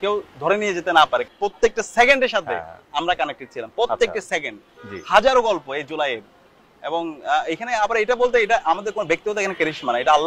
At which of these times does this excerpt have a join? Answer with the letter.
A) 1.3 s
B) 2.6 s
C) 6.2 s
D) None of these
A